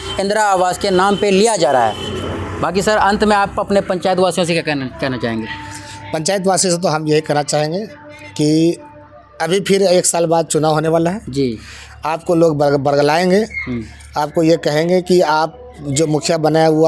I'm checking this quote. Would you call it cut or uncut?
uncut